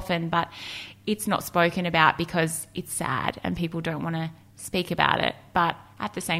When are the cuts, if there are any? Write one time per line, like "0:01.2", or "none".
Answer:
none